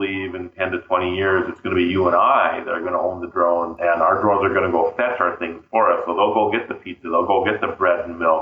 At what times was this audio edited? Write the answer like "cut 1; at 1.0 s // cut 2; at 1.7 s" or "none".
none